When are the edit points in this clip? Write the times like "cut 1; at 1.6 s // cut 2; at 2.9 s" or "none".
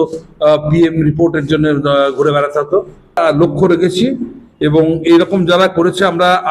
cut 1; at 3.2 s